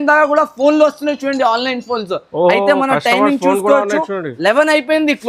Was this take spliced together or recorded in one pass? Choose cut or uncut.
uncut